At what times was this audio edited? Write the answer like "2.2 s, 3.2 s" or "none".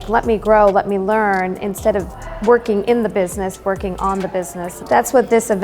4.7 s